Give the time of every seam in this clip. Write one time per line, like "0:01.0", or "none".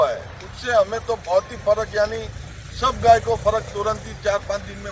none